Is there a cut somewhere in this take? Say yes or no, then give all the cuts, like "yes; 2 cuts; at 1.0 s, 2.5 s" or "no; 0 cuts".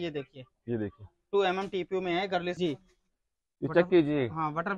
yes; 1 cut; at 2.5 s